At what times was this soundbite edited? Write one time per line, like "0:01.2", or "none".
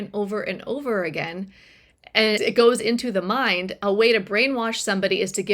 0:02.4